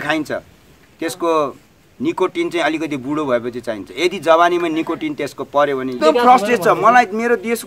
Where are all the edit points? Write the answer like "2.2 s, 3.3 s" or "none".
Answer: 6.0 s